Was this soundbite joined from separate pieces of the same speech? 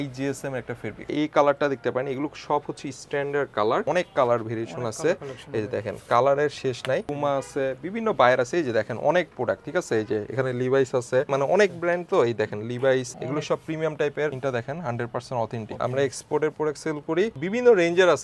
yes; 8 cuts; at 1.1 s, 3.8 s, 7.1 s, 11.3 s, 13.2 s, 14.4 s, 15.7 s, 17.4 s

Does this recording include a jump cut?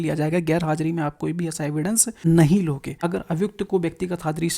yes; 2 cuts; at 2.1 s, 2.9 s

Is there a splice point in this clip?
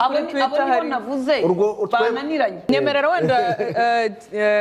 yes; 1 cut; at 2.6 s

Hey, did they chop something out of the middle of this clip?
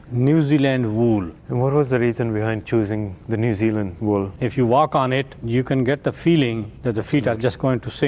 yes; 5 cuts; at 1.4 s, 3.1 s, 4.2 s, 5.4 s, 6.7 s

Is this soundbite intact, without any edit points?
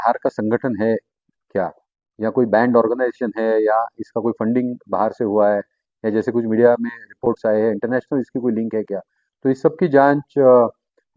yes; 0 cuts

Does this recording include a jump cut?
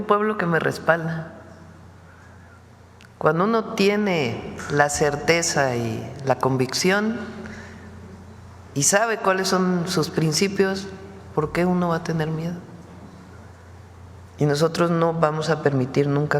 yes; 1 cut; at 13.5 s

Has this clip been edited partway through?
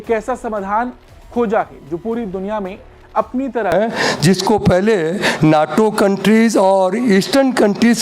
yes; 1 cut; at 3.7 s

